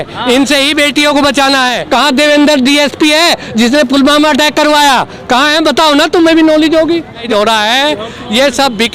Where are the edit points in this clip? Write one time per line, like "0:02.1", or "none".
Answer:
0:01.8
0:07.2